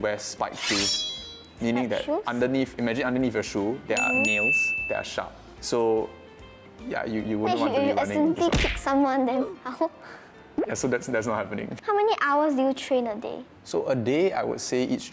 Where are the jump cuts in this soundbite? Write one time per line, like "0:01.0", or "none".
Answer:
none